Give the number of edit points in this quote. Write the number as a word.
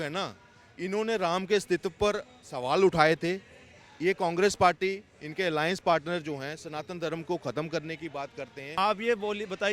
one